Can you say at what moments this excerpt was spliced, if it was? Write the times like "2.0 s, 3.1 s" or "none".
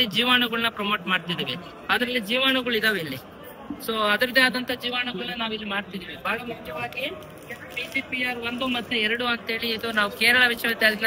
none